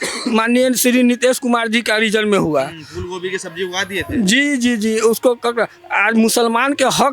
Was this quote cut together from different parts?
no; 0 cuts

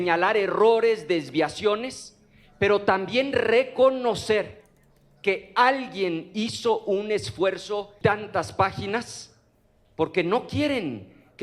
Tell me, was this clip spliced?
yes; 1 cut; at 7.9 s

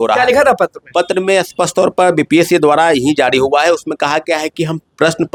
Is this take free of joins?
yes; 0 cuts

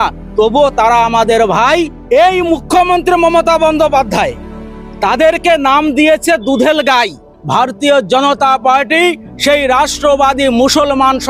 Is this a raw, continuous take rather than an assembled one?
no; 2 cuts; at 2.0 s, 7.3 s

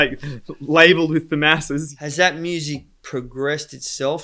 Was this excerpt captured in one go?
no; 1 cut; at 1.9 s

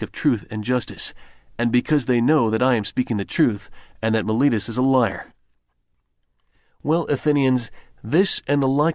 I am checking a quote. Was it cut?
yes; 1 cut; at 2.0 s

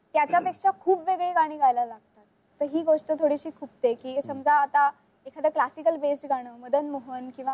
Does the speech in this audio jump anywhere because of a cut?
no; 0 cuts

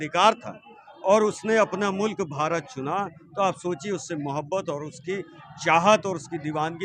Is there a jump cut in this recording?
no; 0 cuts

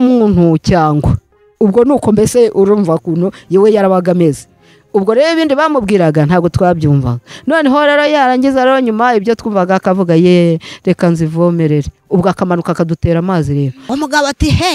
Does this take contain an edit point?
yes; 1 cut; at 13.8 s

